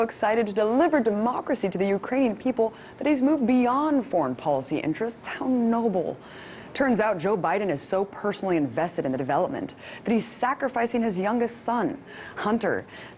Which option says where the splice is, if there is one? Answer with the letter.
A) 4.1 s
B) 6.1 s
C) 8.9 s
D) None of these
C